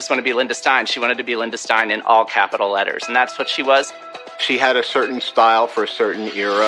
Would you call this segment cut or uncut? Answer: cut